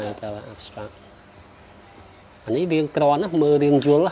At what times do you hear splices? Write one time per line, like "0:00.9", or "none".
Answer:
none